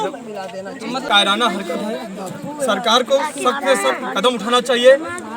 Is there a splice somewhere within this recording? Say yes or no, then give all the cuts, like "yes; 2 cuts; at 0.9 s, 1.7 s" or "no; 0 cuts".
yes; 1 cut; at 1.0 s